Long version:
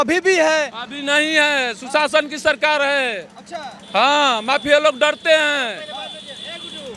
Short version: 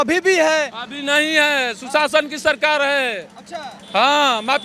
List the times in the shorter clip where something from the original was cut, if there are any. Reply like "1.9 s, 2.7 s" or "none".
none